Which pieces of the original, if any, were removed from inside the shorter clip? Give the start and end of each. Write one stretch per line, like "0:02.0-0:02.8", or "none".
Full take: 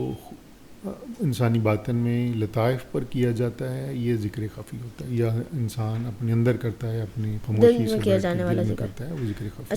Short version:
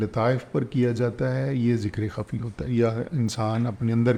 none